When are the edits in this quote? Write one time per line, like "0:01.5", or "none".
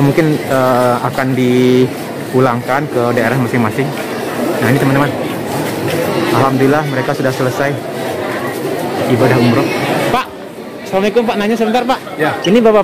0:10.1